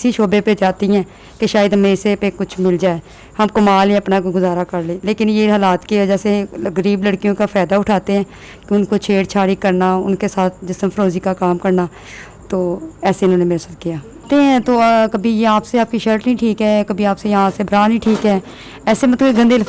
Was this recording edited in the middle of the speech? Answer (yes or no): yes